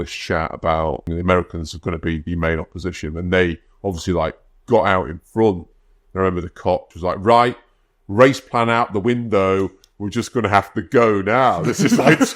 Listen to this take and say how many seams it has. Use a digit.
2